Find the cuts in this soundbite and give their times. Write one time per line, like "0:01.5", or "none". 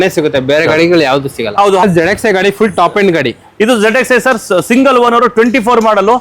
0:01.8